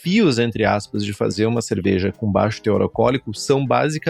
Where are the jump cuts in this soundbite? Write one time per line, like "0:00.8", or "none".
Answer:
none